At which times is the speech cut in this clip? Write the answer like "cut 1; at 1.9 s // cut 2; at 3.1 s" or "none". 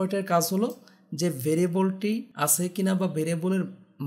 cut 1; at 2.3 s